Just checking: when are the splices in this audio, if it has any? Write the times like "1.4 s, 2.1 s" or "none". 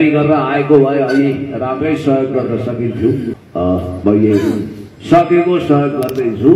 3.9 s